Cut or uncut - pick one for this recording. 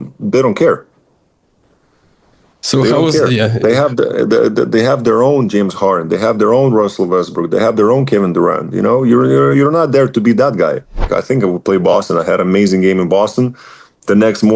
cut